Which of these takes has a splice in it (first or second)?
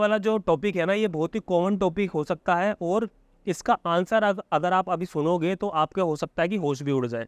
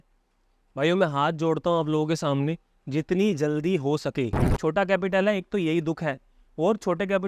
second